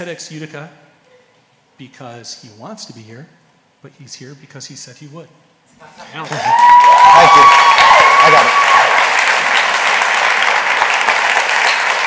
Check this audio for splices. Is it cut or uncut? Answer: uncut